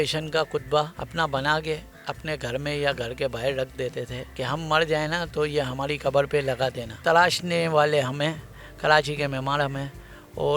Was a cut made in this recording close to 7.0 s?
yes; 2 cuts; at 1.0 s, 7.0 s

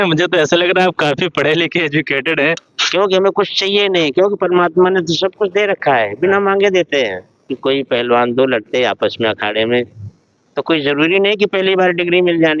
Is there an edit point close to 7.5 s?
yes; 2 cuts; at 2.6 s, 7.5 s

